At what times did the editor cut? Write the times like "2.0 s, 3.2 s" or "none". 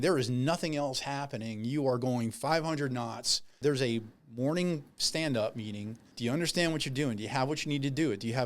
3.6 s, 6.0 s

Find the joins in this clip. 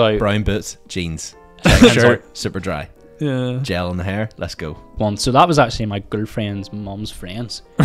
4.9 s

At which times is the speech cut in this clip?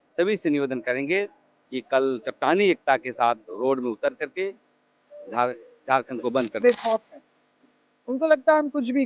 6.6 s

